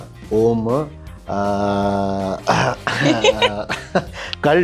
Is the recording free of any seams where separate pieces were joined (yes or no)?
yes